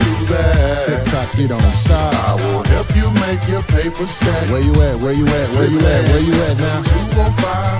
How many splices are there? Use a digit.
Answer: 0